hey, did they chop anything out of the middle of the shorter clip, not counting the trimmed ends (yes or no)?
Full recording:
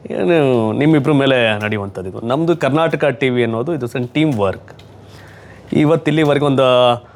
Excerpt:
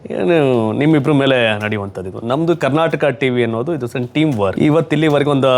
yes